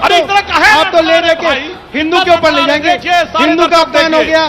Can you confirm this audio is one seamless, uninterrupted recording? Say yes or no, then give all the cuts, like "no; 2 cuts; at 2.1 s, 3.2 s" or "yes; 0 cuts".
yes; 0 cuts